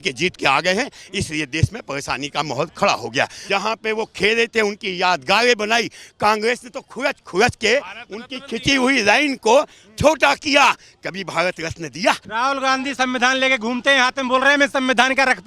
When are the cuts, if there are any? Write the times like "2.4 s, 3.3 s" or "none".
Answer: 3.4 s, 12.2 s